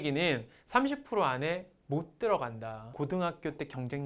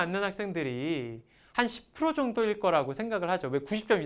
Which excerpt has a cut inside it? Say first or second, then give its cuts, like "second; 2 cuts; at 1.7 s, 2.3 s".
first; 1 cut; at 3.0 s